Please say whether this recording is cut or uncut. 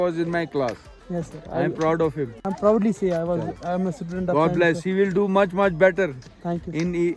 uncut